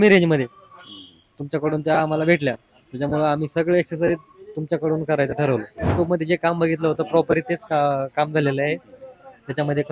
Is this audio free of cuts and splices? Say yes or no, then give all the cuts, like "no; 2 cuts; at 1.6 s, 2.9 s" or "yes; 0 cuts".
no; 1 cut; at 5.9 s